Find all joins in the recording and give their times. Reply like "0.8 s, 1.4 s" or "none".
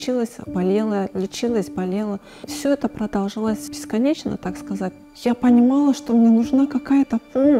3.7 s, 5.0 s